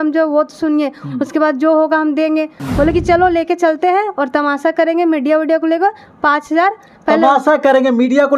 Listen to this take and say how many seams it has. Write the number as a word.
one